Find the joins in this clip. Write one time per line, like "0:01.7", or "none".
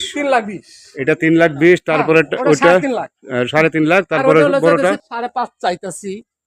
0:05.0